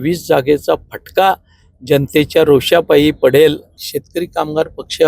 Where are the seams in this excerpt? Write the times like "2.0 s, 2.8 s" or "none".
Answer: 3.8 s